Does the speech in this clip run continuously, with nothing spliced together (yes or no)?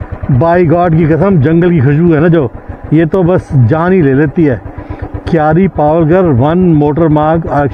yes